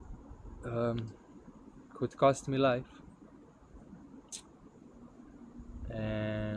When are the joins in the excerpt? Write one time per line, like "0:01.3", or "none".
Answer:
none